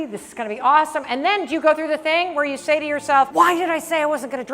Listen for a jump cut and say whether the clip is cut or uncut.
cut